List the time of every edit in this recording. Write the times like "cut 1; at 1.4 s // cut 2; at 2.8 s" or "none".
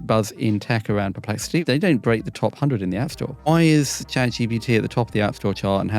cut 1; at 1.6 s // cut 2; at 3.5 s